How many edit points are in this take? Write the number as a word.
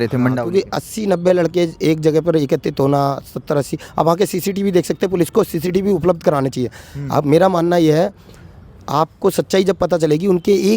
zero